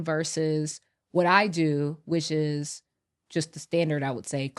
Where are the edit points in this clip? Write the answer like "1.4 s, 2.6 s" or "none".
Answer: none